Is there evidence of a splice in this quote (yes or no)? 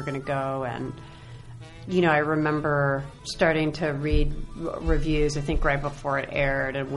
yes